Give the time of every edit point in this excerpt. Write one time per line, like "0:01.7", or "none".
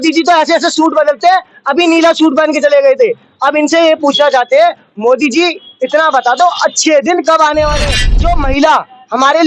0:08.0